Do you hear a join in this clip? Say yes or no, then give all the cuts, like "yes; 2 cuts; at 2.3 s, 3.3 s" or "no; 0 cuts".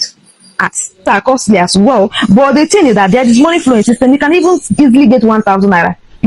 yes; 1 cut; at 1.0 s